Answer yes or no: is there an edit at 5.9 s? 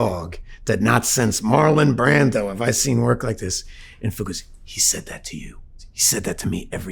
yes